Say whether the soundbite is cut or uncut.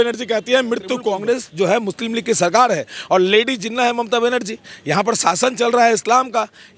cut